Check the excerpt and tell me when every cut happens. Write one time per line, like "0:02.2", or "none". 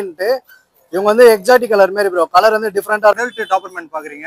0:03.2